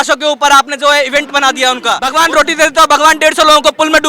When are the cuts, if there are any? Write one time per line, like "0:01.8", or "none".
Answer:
0:02.0